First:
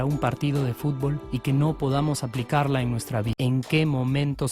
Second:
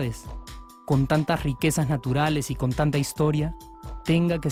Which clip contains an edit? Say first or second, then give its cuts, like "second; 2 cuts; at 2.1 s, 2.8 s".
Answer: first; 1 cut; at 3.3 s